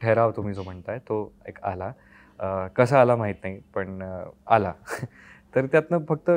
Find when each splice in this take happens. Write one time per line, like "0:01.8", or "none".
none